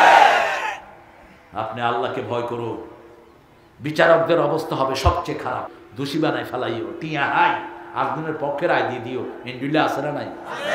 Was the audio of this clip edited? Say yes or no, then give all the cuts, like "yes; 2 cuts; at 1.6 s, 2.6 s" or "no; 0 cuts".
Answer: yes; 1 cut; at 5.7 s